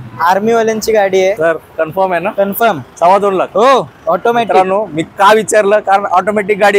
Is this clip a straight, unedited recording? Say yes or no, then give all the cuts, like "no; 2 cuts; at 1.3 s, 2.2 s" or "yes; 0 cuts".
no; 1 cut; at 1.4 s